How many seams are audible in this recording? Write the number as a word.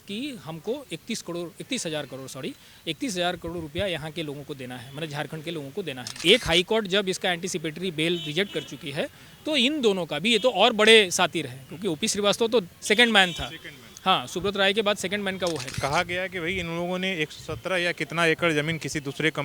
two